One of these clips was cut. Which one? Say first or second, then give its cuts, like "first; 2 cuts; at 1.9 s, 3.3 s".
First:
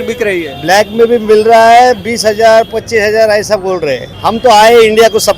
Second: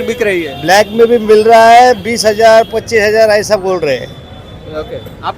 first; 1 cut; at 4.1 s